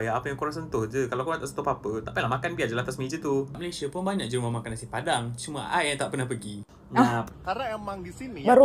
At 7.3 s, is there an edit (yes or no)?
yes